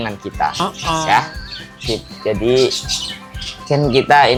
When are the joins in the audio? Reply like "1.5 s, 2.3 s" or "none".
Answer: none